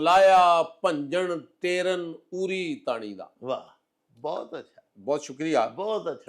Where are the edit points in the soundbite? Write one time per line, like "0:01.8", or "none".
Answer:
none